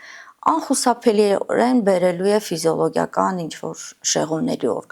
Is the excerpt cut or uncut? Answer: uncut